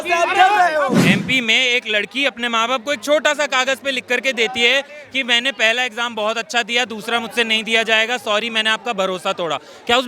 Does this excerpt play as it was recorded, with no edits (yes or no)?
no